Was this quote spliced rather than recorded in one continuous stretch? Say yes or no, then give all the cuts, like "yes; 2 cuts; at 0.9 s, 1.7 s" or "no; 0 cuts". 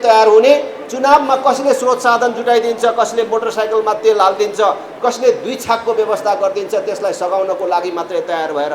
no; 0 cuts